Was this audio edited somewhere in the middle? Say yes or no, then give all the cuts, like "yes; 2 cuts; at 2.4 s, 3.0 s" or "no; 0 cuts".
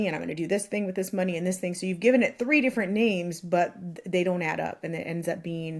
no; 0 cuts